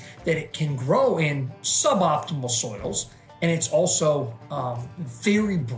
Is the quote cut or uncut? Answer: uncut